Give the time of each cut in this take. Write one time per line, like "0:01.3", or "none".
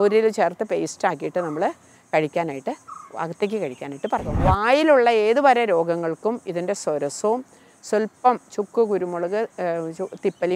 0:04.3